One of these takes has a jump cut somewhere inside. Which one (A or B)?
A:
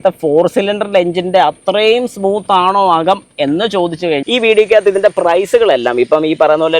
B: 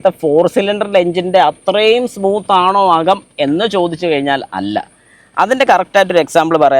A